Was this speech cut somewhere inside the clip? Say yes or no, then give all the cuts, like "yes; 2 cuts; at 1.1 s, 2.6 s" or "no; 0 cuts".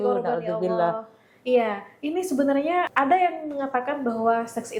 yes; 1 cut; at 2.9 s